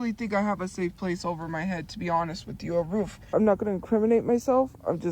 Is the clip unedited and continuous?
no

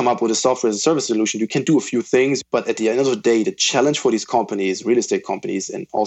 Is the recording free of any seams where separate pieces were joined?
no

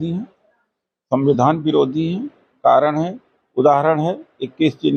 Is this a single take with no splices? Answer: yes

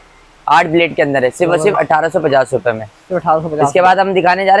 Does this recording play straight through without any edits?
yes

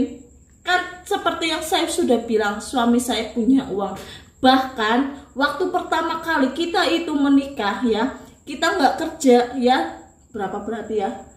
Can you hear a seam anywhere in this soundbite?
no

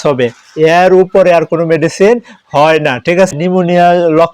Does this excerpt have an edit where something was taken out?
yes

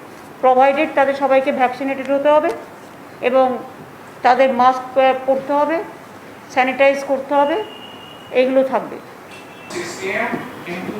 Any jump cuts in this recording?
yes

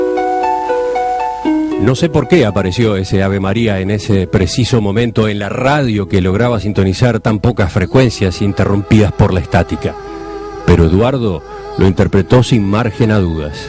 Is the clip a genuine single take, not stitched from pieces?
yes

